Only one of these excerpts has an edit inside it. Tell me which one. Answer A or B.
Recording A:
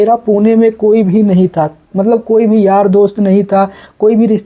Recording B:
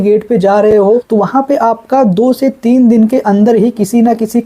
B